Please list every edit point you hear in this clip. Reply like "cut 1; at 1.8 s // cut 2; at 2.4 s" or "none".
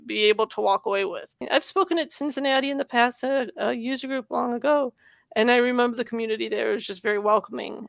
cut 1; at 1.3 s

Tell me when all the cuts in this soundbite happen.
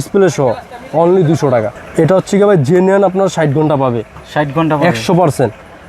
cut 1; at 1.7 s

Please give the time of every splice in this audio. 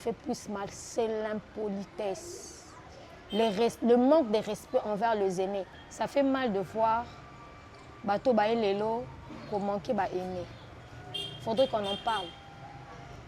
cut 1; at 5.8 s

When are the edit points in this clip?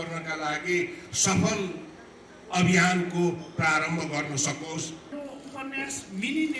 cut 1; at 5.1 s

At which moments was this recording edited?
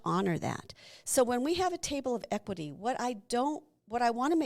cut 1; at 2.2 s

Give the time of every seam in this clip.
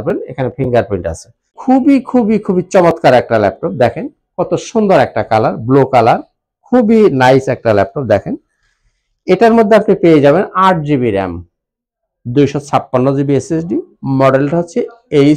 cut 1; at 1.5 s

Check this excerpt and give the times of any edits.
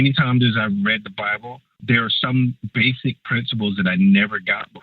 cut 1; at 1.8 s // cut 2; at 2.6 s

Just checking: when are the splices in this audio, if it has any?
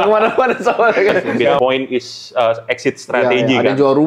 cut 1; at 1.6 s

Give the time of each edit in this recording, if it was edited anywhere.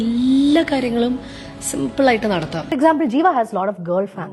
cut 1; at 2.7 s

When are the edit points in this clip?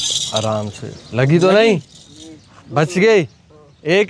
none

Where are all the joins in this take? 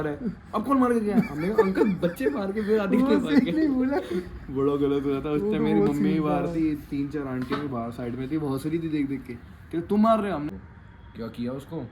cut 1; at 10.5 s

